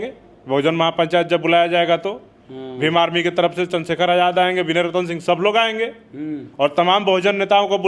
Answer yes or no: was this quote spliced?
no